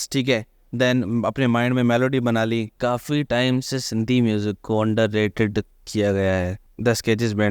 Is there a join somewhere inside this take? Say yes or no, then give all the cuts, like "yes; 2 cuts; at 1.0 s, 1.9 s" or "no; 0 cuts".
yes; 2 cuts; at 2.7 s, 6.6 s